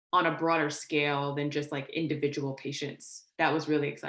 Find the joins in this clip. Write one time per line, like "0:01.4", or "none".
0:03.2